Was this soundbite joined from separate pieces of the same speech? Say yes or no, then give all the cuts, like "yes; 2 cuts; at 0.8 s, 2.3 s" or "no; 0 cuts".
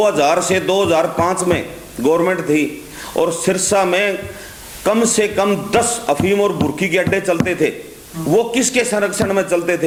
no; 0 cuts